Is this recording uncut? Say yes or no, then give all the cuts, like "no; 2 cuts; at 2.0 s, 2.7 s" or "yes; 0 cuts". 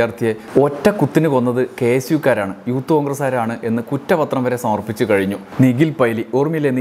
no; 1 cut; at 5.5 s